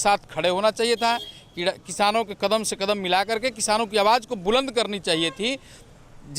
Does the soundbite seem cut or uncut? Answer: uncut